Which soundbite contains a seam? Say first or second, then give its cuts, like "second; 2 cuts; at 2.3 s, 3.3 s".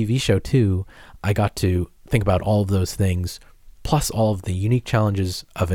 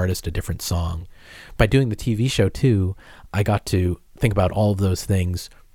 second; 1 cut; at 1.0 s